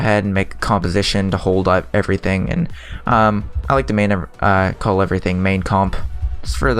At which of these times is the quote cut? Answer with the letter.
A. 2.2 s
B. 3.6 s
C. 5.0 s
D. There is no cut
C